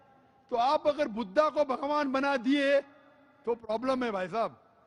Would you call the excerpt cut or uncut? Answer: uncut